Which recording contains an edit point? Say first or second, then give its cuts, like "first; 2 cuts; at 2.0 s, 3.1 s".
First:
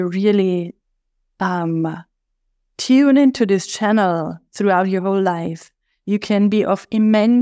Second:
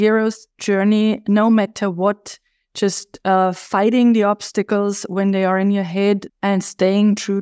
second; 1 cut; at 6.3 s